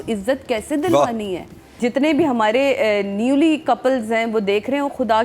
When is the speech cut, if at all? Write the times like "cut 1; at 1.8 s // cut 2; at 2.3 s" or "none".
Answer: cut 1; at 1.7 s